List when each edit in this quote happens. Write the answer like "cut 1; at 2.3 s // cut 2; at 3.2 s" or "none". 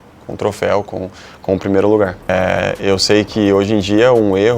cut 1; at 2.3 s

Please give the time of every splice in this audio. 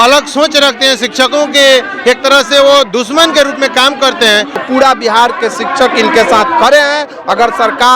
cut 1; at 4.6 s

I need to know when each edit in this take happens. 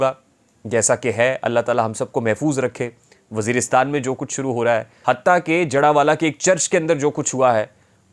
cut 1; at 4.9 s

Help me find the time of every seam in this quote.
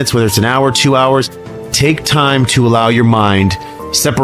cut 1; at 1.3 s

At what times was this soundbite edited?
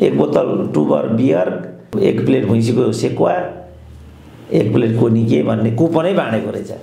cut 1; at 1.9 s

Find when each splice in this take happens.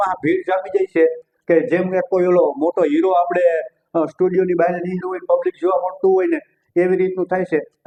none

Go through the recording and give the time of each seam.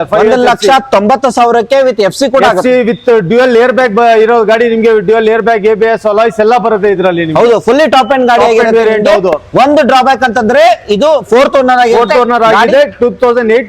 none

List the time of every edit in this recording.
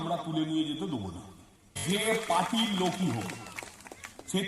cut 1; at 1.8 s

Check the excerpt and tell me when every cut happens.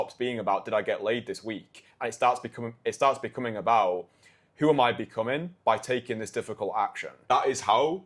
cut 1; at 7.1 s

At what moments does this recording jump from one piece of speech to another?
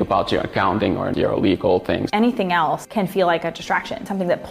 cut 1; at 1.1 s // cut 2; at 2.1 s

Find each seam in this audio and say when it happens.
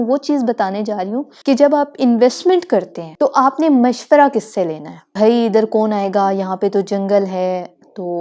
cut 1; at 1.3 s // cut 2; at 3.0 s // cut 3; at 5.0 s

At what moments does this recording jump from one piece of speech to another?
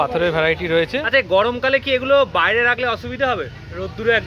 cut 1; at 1.0 s

